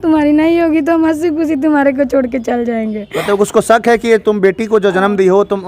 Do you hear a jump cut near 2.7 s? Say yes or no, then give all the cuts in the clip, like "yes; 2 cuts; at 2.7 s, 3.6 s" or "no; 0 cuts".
no; 0 cuts